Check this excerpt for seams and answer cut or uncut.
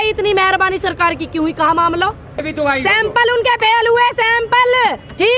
cut